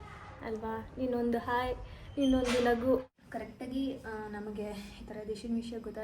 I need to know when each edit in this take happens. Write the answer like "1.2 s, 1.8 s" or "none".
3.2 s